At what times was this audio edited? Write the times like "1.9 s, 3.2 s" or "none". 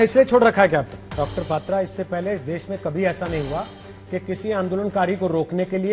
1.2 s